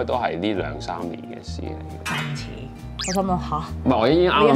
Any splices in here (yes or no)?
no